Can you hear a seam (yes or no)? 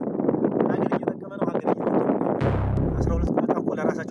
yes